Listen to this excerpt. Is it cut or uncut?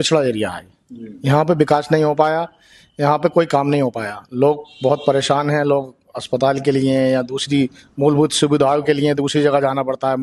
uncut